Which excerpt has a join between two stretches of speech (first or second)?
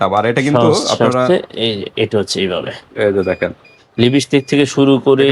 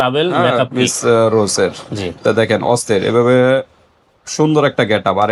first